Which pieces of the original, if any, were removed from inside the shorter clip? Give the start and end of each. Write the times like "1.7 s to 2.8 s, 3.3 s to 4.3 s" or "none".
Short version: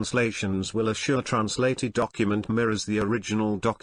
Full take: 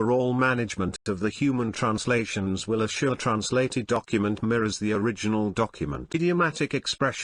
none